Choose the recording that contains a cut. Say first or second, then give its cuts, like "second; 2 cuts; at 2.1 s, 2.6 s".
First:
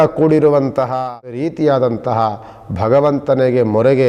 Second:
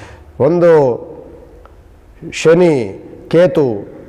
first; 1 cut; at 1.5 s